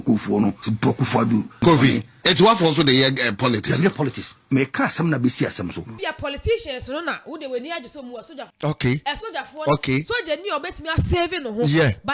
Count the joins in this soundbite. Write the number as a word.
three